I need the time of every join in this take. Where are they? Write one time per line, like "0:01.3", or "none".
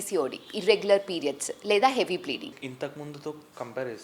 0:02.5